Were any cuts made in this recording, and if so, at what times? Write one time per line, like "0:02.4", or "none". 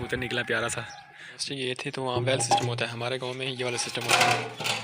0:01.4